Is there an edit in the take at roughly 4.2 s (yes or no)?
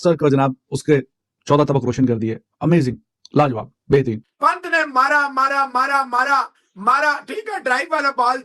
yes